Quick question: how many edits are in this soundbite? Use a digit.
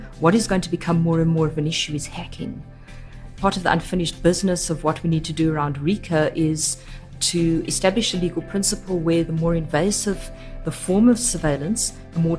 2